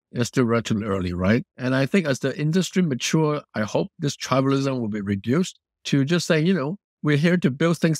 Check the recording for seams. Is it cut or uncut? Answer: cut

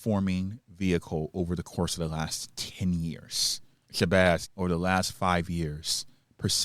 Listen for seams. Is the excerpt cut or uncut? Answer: cut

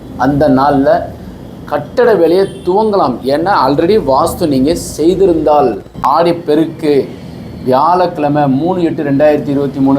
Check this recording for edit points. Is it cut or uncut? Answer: cut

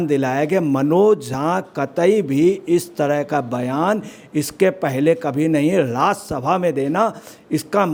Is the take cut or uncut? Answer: uncut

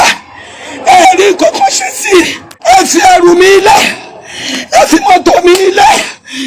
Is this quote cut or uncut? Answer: cut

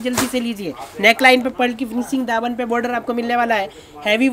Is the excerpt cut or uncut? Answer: uncut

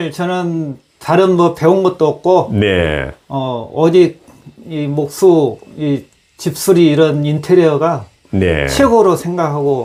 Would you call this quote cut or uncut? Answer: uncut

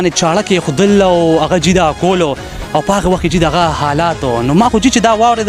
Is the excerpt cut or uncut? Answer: uncut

